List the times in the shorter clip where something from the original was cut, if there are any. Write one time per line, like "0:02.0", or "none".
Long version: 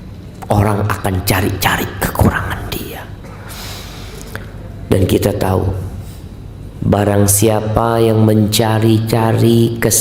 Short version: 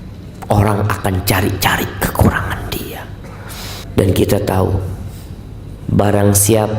0:03.8